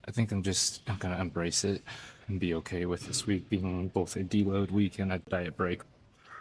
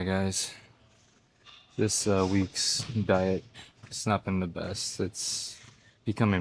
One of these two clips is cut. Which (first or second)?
first